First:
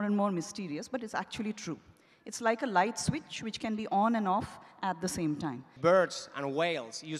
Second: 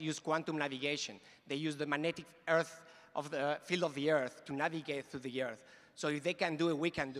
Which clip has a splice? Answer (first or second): first